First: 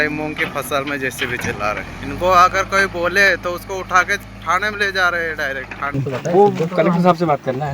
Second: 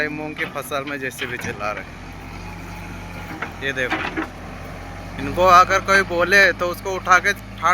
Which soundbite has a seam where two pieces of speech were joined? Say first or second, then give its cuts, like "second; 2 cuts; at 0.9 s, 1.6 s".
first; 2 cuts; at 1.9 s, 5.9 s